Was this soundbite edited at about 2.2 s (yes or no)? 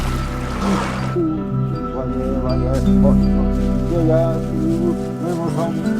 no